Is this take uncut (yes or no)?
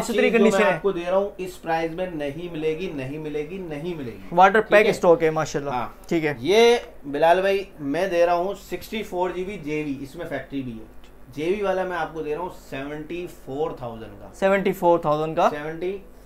yes